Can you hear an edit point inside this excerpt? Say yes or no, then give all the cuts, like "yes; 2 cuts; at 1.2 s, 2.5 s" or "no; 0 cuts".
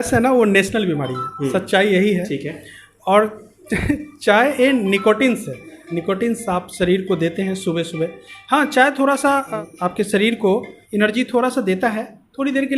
yes; 2 cuts; at 9.5 s, 10.8 s